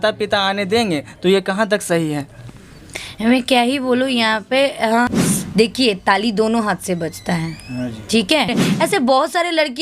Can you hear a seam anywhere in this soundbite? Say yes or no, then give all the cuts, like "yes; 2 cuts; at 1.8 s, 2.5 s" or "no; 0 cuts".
yes; 2 cuts; at 5.3 s, 8.6 s